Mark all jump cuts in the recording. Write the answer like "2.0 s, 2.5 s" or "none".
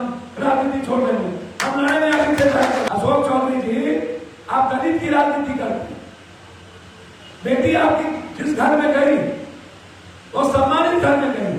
2.9 s